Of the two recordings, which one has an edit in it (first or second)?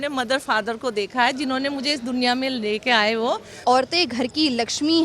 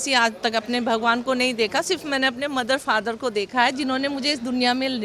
first